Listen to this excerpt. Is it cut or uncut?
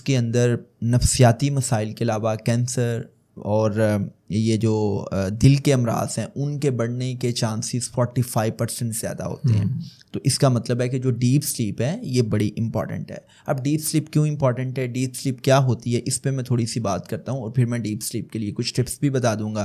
uncut